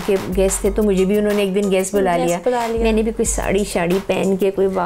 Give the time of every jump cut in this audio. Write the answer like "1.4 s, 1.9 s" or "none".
none